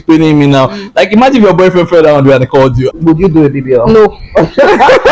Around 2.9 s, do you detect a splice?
yes; 1 cut; at 2.9 s

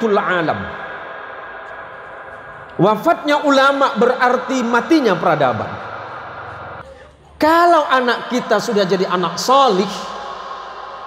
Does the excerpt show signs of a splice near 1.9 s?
no; 1 cut; at 6.9 s

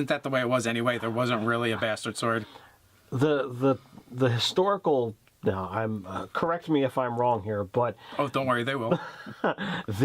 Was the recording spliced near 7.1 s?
yes; 1 cut; at 7.1 s

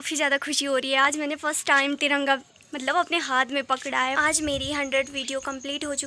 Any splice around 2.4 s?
no; 1 cut; at 4.2 s

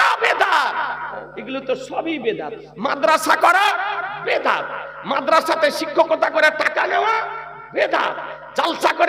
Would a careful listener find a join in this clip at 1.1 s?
yes; 1 cut; at 1.1 s

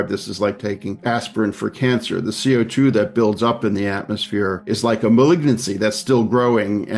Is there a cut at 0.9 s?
yes; 2 cuts; at 0.9 s, 4.7 s

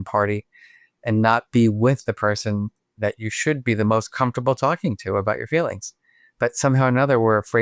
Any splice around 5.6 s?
no; 0 cuts

